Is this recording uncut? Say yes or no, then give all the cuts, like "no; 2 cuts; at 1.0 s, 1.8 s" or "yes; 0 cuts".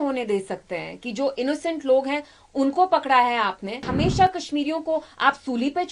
no; 1 cut; at 3.9 s